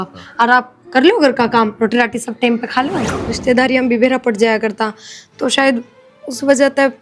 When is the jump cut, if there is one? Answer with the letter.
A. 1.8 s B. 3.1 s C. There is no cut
B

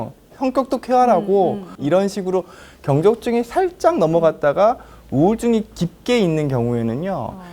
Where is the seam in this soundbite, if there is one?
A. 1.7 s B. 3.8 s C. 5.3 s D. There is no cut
A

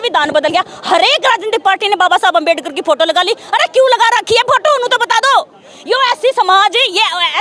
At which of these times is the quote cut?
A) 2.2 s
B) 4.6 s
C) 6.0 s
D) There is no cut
D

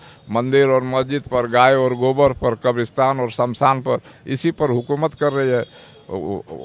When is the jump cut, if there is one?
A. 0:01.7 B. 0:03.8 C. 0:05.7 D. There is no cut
D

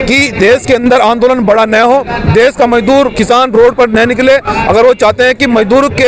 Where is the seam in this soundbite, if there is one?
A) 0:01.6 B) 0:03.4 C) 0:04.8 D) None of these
D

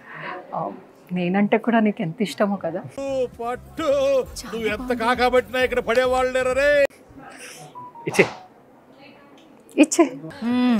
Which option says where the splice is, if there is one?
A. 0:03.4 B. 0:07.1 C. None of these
C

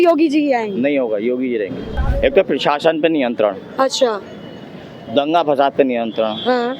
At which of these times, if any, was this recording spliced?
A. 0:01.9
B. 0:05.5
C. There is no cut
A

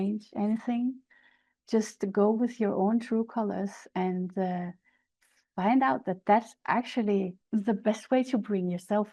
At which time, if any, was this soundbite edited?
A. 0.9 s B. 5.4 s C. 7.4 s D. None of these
C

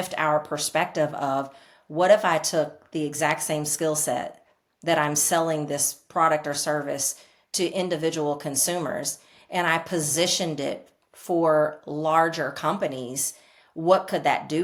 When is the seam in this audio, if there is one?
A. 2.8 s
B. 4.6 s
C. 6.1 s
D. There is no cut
D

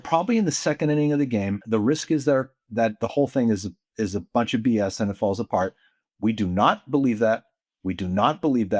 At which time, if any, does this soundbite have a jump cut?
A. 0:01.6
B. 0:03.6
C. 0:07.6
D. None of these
A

